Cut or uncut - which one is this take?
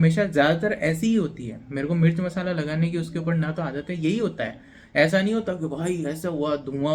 uncut